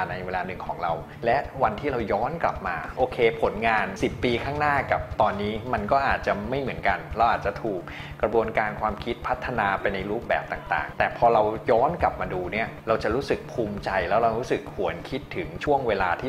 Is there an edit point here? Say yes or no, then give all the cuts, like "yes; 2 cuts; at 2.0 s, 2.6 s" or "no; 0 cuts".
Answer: no; 0 cuts